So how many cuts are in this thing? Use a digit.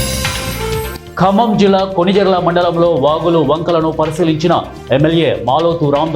1